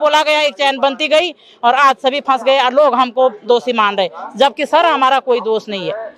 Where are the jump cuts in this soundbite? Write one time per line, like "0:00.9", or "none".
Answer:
none